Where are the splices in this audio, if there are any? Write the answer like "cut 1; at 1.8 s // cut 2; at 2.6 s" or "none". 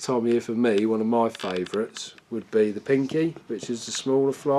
none